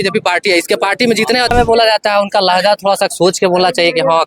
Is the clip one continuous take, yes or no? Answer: no